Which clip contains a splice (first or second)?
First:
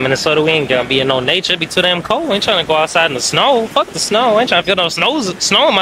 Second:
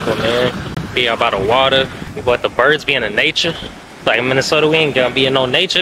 second